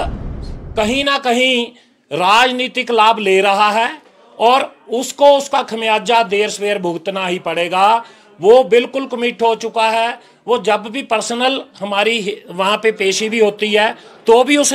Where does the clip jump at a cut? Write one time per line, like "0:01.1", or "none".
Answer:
none